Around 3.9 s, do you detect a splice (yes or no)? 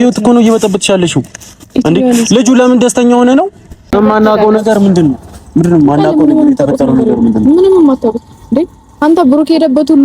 yes